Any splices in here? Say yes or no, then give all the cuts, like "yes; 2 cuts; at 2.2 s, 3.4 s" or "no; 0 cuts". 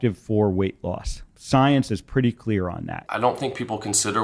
yes; 1 cut; at 2.9 s